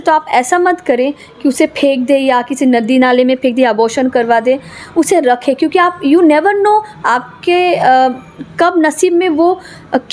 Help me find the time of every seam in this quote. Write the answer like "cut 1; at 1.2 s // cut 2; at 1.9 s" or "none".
none